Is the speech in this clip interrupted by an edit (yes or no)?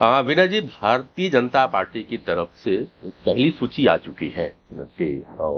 no